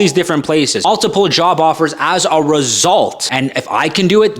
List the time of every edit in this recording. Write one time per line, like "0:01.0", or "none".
0:00.8
0:03.2